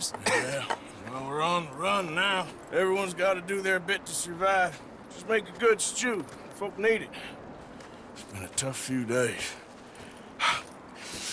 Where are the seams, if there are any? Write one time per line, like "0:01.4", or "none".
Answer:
none